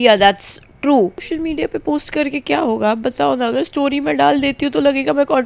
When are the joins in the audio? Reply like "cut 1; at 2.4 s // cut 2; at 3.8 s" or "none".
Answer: cut 1; at 1.3 s